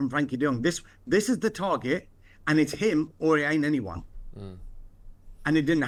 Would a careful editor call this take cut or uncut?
uncut